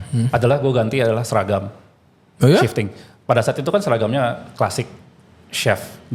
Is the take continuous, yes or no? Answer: yes